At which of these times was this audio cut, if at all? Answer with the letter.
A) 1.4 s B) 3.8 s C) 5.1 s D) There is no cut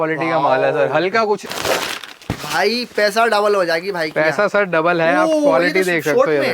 A